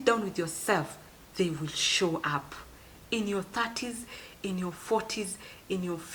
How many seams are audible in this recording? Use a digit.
0